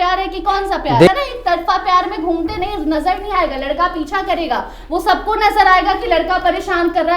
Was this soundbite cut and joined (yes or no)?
yes